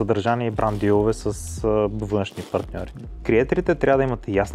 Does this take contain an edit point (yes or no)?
no